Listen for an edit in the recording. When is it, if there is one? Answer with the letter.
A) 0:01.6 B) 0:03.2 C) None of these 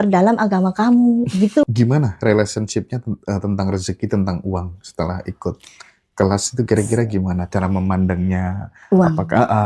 A